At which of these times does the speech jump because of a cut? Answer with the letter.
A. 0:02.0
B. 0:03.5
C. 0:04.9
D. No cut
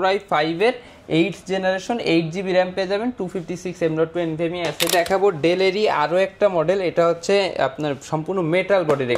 C